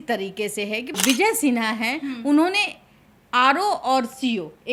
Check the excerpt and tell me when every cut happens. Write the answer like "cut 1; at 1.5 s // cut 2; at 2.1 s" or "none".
cut 1; at 0.9 s